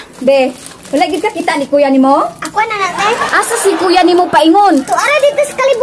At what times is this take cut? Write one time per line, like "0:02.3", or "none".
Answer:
none